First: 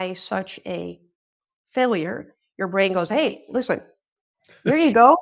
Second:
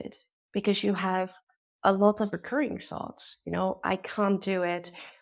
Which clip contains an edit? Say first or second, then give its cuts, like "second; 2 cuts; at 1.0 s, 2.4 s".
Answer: second; 1 cut; at 2.3 s